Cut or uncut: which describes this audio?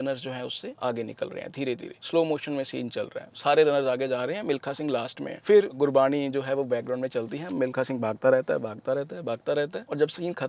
uncut